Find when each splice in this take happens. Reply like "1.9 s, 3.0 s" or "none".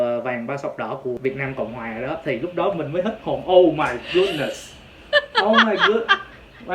1.2 s